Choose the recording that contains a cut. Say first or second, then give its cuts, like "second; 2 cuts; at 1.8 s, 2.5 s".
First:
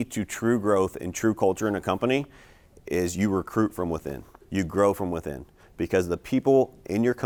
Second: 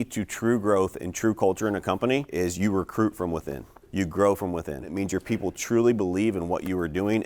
second; 2 cuts; at 2.3 s, 5.0 s